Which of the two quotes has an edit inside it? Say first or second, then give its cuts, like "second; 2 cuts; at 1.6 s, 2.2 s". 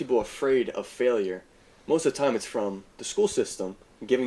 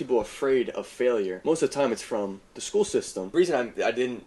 second; 2 cuts; at 1.4 s, 3.3 s